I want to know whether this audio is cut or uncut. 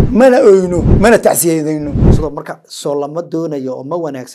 cut